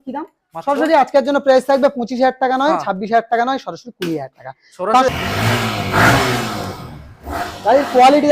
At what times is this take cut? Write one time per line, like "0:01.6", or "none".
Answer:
0:05.1